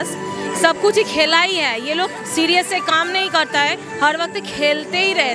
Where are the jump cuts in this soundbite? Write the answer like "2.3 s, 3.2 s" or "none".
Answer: none